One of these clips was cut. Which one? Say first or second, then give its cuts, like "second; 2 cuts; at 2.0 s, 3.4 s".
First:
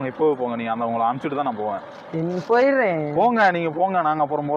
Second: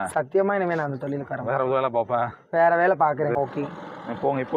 second; 1 cut; at 3.4 s